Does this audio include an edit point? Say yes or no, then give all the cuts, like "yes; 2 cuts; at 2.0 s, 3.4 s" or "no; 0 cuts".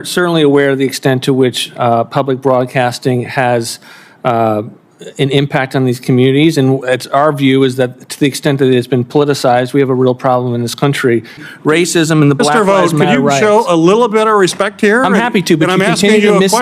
yes; 1 cut; at 11.4 s